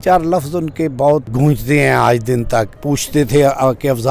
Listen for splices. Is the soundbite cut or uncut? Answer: cut